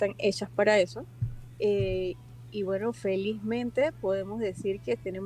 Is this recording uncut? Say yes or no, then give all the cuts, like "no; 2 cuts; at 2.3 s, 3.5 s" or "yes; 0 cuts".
yes; 0 cuts